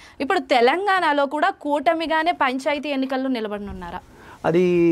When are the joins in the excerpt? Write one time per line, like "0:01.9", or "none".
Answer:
none